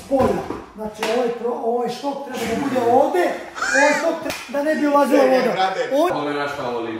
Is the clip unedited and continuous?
no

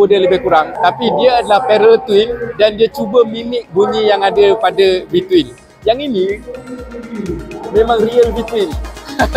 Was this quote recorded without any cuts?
yes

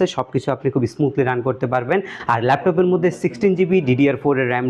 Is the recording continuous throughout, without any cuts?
yes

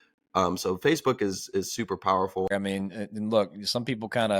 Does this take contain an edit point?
yes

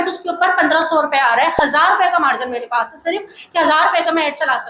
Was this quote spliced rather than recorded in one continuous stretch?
no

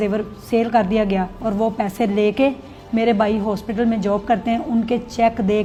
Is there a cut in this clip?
no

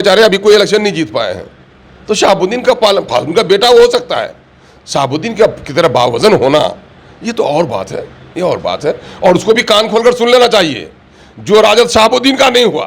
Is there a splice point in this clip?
no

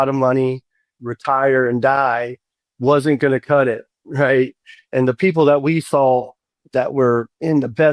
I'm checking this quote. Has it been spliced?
yes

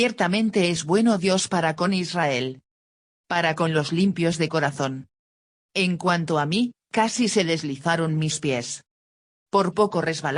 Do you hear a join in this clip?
yes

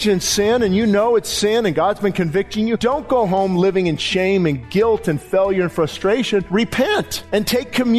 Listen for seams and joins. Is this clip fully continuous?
no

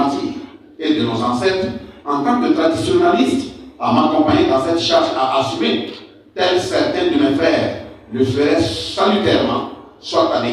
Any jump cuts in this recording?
no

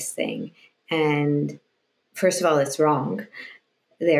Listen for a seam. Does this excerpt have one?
no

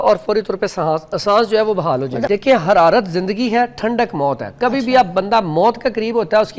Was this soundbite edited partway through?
yes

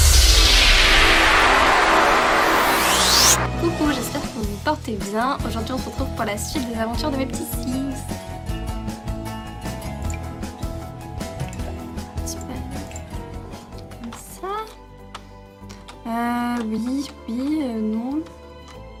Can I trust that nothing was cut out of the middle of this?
yes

